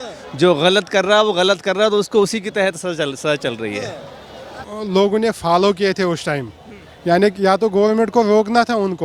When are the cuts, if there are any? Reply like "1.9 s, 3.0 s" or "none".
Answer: 4.7 s